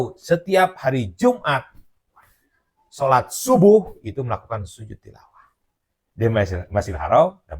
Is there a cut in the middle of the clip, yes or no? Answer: no